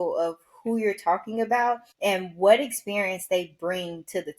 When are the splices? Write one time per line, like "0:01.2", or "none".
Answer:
0:01.9